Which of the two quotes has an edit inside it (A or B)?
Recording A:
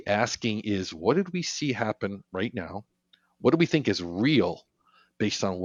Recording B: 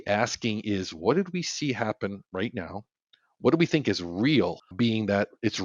B